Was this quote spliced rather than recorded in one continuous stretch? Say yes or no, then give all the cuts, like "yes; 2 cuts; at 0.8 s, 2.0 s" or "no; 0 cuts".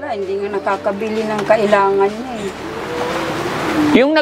no; 0 cuts